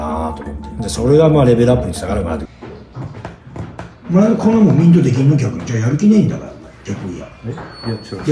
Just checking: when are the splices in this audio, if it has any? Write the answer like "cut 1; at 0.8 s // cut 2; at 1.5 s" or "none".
cut 1; at 2.5 s